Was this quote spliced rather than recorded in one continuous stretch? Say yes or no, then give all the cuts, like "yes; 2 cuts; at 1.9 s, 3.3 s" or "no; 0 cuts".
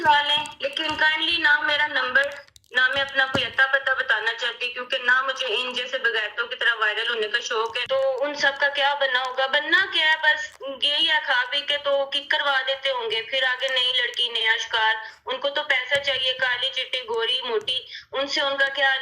yes; 1 cut; at 7.8 s